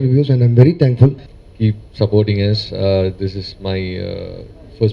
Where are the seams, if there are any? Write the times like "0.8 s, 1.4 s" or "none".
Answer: 1.3 s

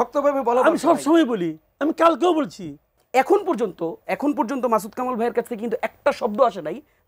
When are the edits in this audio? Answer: 2.9 s

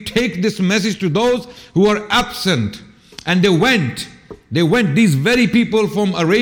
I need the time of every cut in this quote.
none

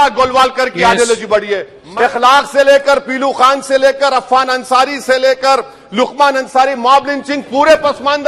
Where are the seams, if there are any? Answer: 1.8 s

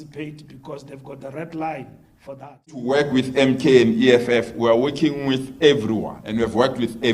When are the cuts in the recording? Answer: 2.9 s, 6.2 s

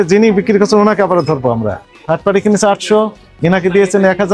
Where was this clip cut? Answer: 1.8 s

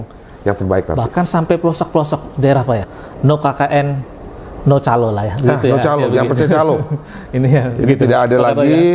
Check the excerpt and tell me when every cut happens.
2.8 s

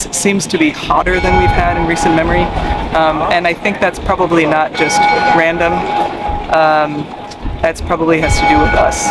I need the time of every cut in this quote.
none

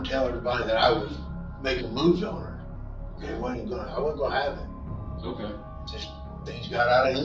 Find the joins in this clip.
none

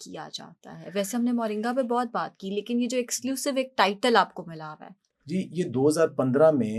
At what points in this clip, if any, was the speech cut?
none

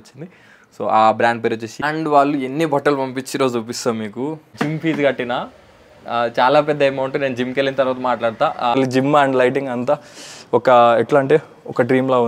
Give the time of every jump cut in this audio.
1.8 s, 4.4 s, 8.8 s

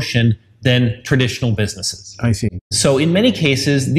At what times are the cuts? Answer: none

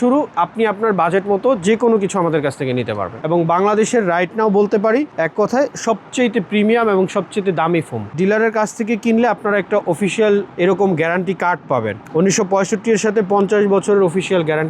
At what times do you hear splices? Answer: 3.2 s, 8.1 s

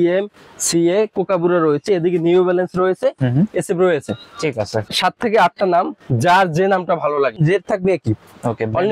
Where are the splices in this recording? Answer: 4.9 s, 7.4 s

